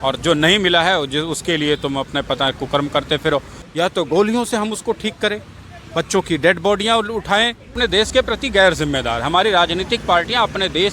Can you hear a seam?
yes; 2 cuts; at 3.6 s, 7.7 s

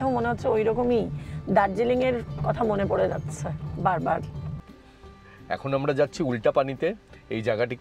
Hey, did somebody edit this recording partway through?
no; 0 cuts

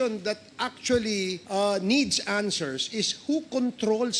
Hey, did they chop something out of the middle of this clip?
yes; 1 cut; at 1.4 s

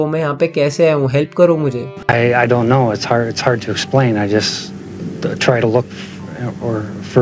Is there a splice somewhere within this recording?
yes; 1 cut; at 1.9 s

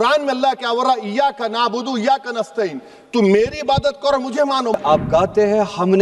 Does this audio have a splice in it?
yes; 1 cut; at 4.8 s

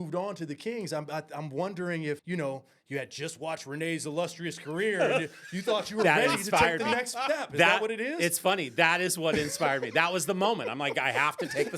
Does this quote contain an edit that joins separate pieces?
yes; 1 cut; at 2.2 s

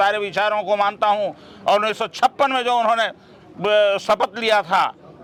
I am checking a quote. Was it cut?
no; 0 cuts

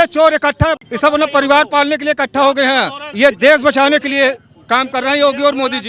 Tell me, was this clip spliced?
yes; 2 cuts; at 0.8 s, 3.0 s

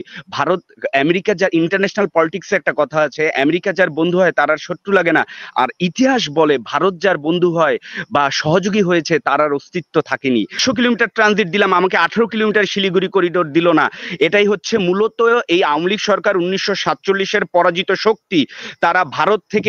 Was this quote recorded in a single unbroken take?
no; 1 cut; at 10.6 s

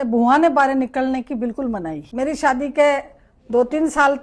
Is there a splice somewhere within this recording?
no; 0 cuts

